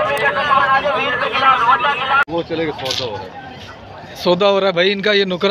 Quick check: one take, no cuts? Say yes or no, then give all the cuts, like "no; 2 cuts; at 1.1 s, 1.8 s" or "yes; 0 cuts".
no; 1 cut; at 2.2 s